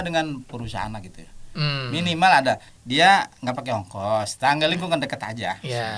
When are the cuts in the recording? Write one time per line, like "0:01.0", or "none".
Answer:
0:02.7